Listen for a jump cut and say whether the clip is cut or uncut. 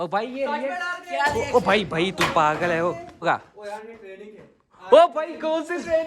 cut